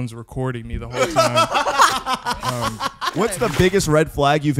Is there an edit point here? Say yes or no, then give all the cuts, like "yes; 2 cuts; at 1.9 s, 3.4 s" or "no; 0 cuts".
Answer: yes; 1 cut; at 3.1 s